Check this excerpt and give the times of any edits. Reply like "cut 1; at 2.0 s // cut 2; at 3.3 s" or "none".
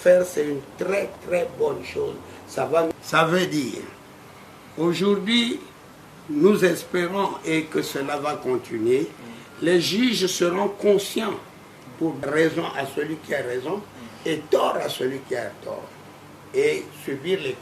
cut 1; at 2.9 s // cut 2; at 12.2 s